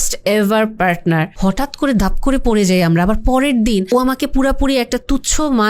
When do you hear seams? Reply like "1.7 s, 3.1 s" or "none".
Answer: 1.3 s, 3.9 s